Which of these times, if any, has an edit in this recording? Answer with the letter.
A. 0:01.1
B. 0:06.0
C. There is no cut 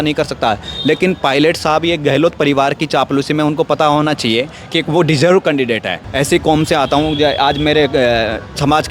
B